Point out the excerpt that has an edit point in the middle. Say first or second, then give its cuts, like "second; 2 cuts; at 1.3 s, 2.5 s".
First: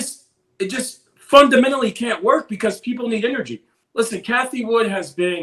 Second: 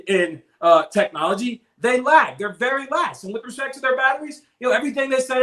first; 1 cut; at 3.8 s